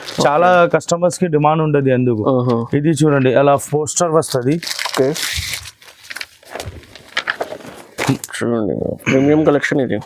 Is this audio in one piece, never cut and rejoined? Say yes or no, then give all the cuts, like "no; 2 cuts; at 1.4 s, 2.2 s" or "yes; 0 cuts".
yes; 0 cuts